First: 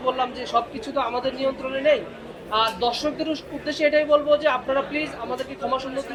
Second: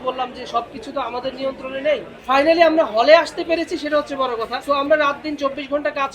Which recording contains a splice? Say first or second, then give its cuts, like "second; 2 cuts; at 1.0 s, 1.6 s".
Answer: second; 2 cuts; at 2.1 s, 4.6 s